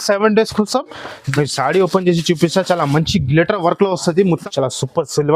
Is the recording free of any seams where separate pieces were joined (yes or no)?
no